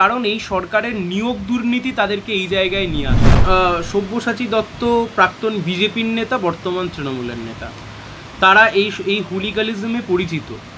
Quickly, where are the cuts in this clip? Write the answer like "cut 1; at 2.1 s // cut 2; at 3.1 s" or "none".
cut 1; at 3.4 s